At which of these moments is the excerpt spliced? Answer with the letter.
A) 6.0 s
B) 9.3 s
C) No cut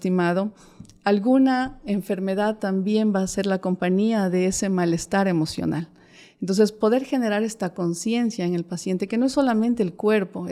C